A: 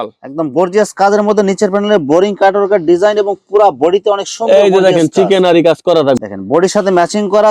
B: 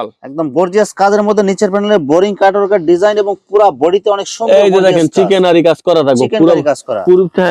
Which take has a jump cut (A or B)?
A